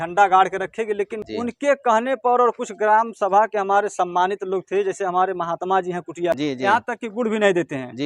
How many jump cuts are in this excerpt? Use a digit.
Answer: 2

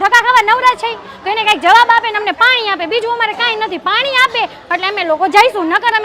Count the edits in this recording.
0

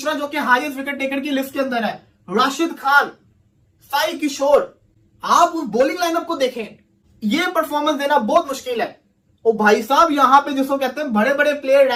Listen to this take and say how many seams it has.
0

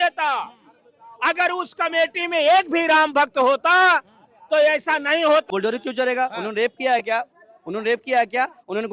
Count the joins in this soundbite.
1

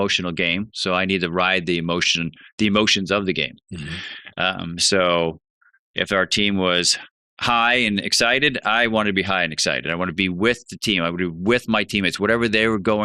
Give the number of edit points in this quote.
0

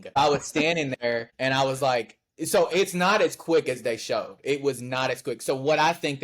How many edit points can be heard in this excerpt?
1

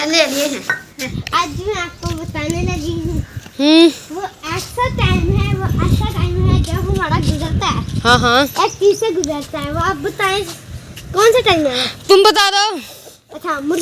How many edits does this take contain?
1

